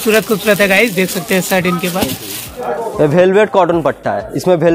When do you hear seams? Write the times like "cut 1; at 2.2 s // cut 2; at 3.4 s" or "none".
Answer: cut 1; at 2.5 s